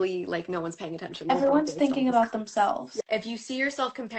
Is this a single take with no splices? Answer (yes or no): no